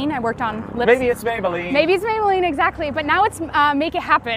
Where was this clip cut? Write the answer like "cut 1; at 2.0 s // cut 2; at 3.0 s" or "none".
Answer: none